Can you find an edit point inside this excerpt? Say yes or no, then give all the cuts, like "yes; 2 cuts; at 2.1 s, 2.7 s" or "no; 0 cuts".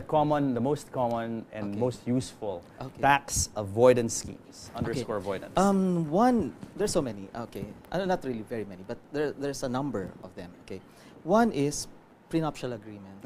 yes; 1 cut; at 5.2 s